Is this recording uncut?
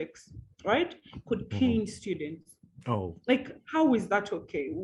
yes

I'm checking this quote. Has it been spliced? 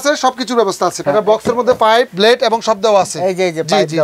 yes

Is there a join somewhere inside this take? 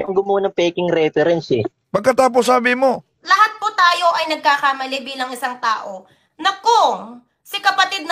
yes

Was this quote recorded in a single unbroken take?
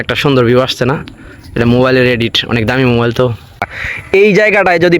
no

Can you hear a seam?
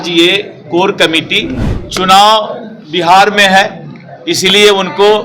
yes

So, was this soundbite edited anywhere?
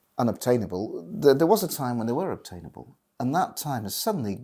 no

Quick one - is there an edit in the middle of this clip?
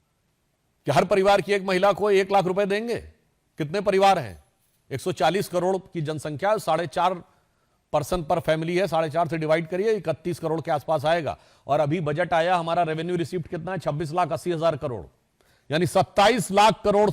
no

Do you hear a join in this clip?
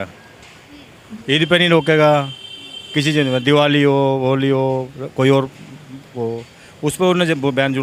no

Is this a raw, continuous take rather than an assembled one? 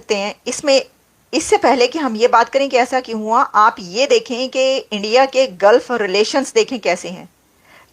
yes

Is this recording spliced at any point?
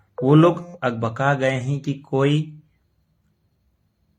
no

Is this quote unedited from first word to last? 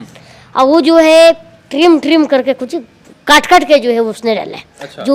yes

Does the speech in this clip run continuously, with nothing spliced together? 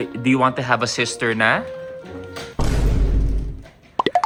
yes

